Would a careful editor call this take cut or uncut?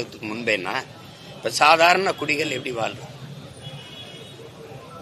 uncut